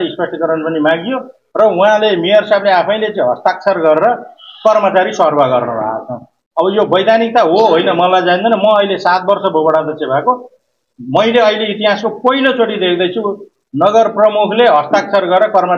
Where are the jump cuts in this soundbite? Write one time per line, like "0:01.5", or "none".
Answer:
none